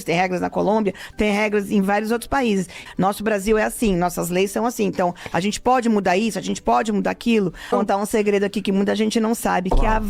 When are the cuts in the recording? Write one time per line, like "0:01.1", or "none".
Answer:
0:02.8
0:07.7